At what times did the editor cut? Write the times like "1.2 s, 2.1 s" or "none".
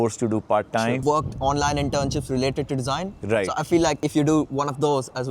1.0 s

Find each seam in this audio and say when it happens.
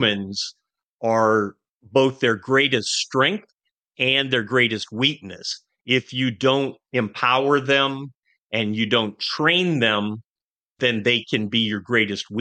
10.7 s

